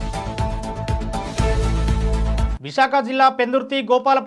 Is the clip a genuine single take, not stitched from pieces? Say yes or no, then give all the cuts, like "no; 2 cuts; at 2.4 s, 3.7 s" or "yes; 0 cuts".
no; 1 cut; at 2.5 s